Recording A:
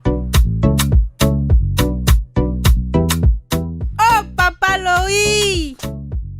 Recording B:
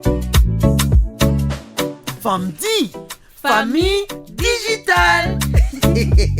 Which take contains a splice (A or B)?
B